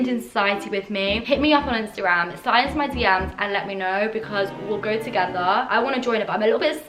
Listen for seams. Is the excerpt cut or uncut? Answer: cut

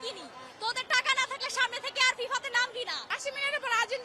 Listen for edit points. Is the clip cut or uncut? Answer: cut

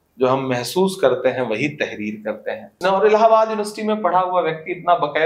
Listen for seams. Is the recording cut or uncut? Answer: cut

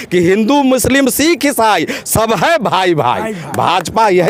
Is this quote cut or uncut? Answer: uncut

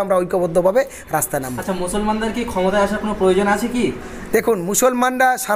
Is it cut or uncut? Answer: uncut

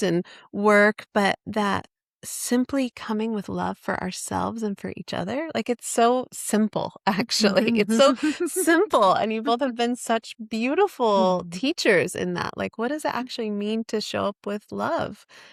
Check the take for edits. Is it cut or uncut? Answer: uncut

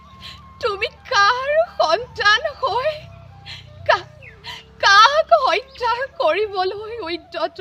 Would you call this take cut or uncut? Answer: uncut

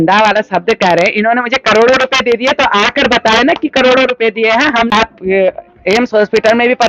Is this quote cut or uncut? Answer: cut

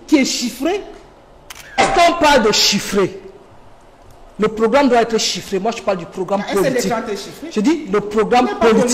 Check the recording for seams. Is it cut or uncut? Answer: cut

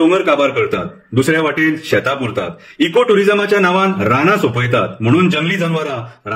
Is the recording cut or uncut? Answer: uncut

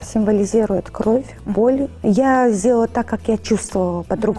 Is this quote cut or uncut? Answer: cut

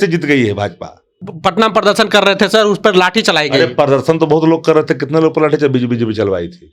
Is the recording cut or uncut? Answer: cut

